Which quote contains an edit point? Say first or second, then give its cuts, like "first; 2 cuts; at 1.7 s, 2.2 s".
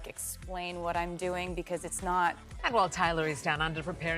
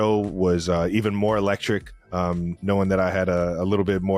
first; 1 cut; at 2.6 s